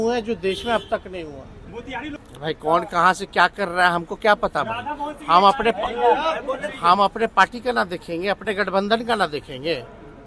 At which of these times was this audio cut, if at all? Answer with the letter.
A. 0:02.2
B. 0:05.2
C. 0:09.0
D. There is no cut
A